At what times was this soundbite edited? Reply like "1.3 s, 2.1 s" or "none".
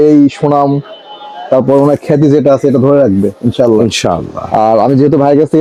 none